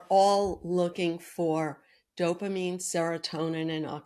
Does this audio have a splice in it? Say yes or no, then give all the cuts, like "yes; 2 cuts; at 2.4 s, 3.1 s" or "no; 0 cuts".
no; 0 cuts